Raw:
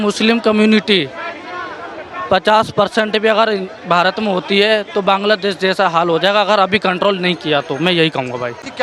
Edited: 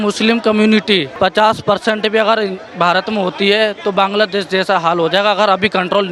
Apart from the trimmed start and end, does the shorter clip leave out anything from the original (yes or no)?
yes